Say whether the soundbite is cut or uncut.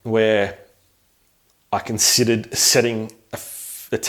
uncut